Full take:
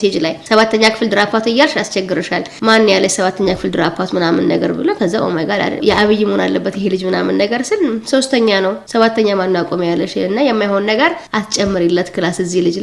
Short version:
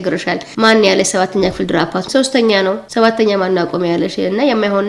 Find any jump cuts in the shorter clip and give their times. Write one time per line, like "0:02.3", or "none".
0:02.0